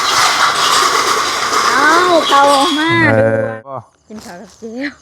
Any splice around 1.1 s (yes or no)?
no